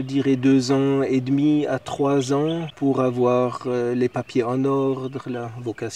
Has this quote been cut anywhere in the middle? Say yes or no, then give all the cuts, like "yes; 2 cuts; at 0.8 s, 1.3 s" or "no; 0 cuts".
no; 0 cuts